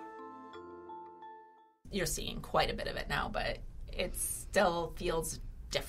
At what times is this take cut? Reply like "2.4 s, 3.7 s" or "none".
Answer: 1.9 s